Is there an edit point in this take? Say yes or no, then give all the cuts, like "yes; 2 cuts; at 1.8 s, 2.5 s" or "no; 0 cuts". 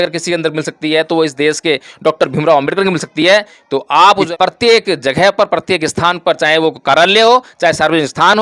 yes; 1 cut; at 4.3 s